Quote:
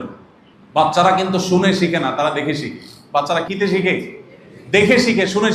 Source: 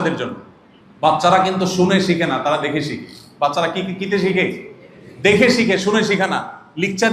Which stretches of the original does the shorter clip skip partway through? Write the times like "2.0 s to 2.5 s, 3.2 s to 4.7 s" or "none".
3.7 s to 4.0 s